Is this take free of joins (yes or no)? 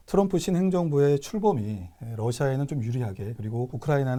yes